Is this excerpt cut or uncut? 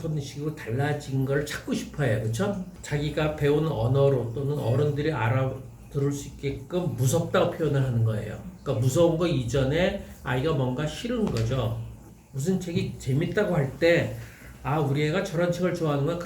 cut